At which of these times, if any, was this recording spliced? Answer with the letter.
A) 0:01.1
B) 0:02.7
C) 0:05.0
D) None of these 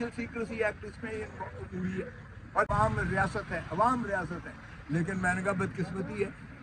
B